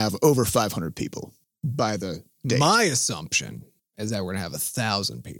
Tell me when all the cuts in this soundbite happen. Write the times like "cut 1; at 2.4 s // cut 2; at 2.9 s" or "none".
cut 1; at 1.5 s